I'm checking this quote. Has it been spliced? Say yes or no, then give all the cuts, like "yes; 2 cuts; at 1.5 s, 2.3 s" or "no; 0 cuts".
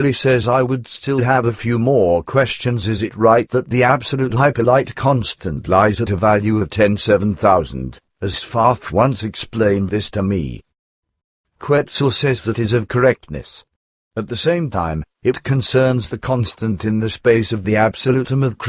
yes; 1 cut; at 1.8 s